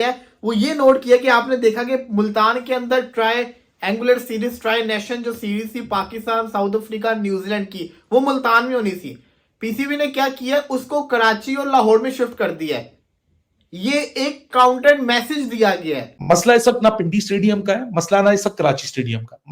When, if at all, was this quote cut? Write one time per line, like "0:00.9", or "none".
0:16.1